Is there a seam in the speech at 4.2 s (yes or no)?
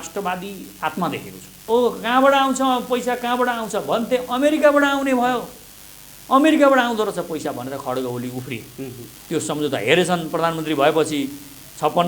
no